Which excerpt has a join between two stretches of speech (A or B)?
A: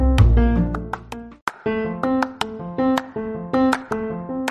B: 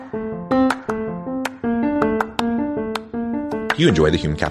A